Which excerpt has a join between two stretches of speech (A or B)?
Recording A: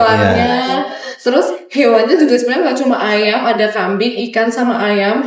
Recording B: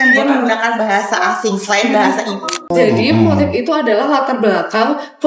B